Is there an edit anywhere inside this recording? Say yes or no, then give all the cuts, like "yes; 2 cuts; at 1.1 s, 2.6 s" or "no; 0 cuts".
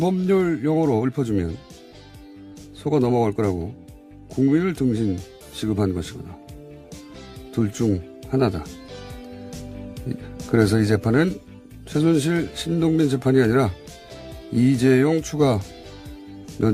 no; 0 cuts